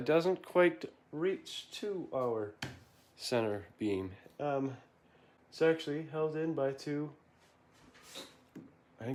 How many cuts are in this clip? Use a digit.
0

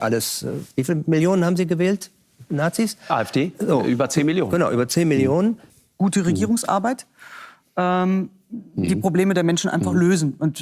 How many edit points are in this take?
1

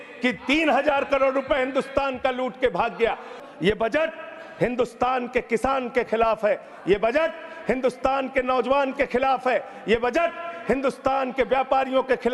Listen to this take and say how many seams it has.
1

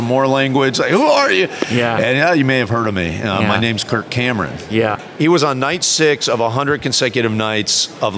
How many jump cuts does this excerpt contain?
1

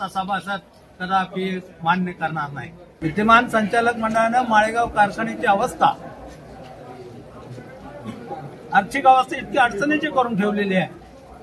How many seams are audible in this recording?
1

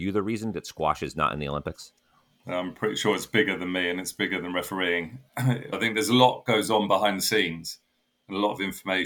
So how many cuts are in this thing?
1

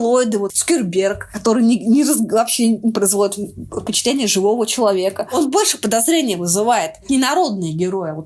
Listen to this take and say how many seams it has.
0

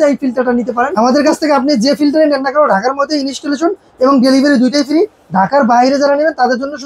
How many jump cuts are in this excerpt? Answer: 1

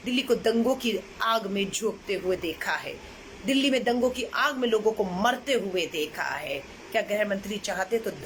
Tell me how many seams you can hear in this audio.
0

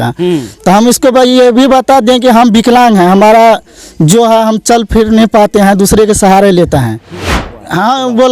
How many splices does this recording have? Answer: 1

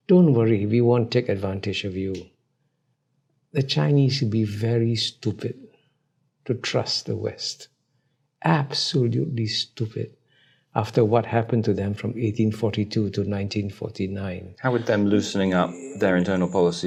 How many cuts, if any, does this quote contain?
0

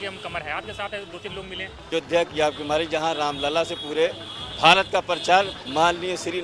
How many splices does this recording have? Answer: 1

